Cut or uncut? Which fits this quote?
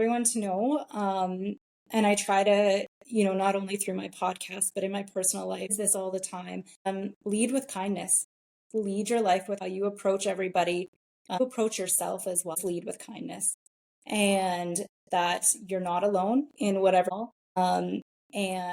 cut